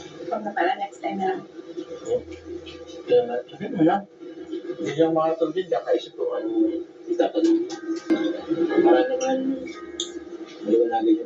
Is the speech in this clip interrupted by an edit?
yes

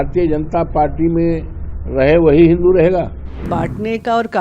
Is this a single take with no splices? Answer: no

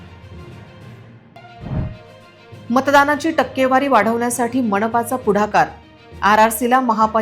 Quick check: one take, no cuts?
no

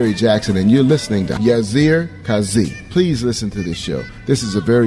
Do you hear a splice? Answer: yes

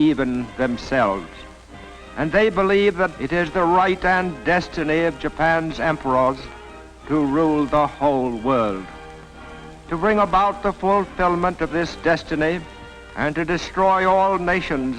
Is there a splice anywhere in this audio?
yes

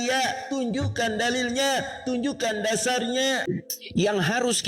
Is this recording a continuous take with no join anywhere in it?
no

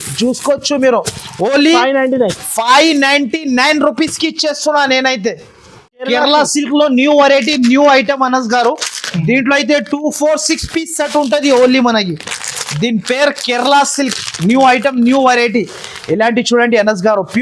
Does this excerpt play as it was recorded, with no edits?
yes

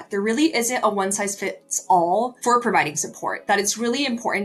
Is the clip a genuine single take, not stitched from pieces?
no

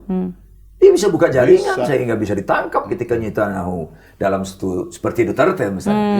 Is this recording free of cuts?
yes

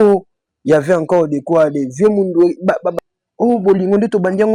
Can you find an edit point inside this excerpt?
yes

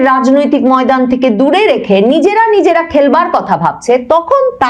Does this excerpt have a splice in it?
no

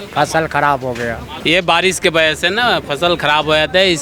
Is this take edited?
yes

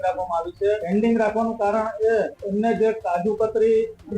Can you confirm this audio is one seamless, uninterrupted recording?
no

